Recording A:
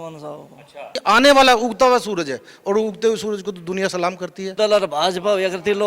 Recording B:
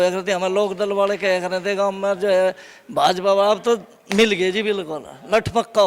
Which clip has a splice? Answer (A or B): A